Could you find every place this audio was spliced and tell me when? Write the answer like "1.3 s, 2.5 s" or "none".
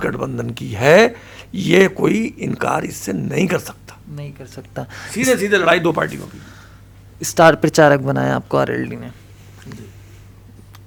none